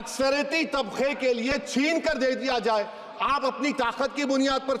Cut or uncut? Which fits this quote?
uncut